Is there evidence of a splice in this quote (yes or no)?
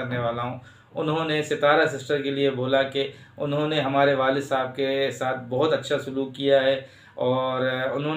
no